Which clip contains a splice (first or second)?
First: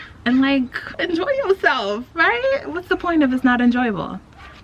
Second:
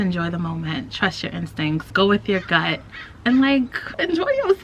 second